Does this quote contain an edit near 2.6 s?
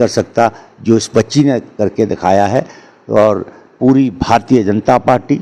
no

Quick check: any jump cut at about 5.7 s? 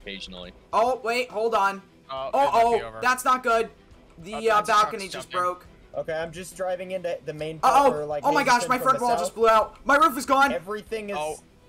yes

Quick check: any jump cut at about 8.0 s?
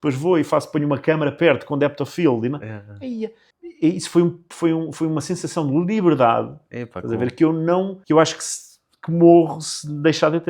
yes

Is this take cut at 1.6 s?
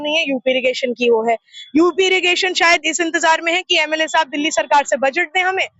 no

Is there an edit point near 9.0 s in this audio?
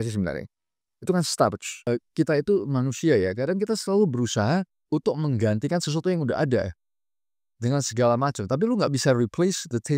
no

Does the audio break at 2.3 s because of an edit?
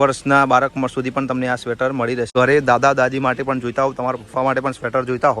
yes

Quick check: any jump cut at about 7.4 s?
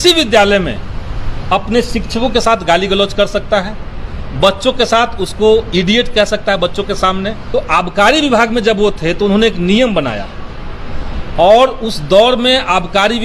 yes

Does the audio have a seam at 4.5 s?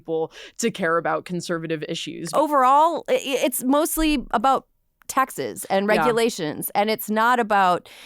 no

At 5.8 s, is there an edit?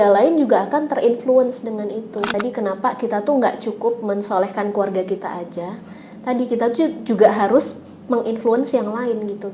no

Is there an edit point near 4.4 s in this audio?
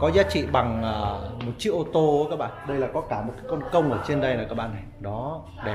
no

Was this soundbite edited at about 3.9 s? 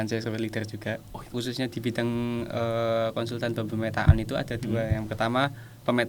no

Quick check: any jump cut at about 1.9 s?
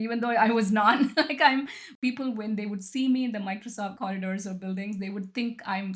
yes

